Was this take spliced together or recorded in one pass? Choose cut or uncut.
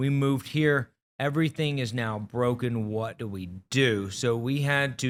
uncut